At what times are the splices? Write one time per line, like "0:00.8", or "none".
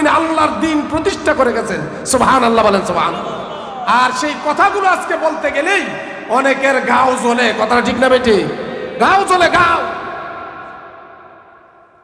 none